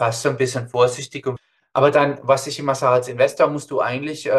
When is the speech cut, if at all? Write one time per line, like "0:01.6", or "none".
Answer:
0:01.3